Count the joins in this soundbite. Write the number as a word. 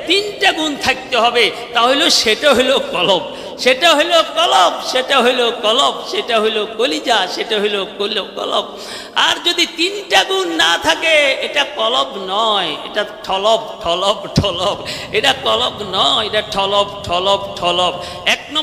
zero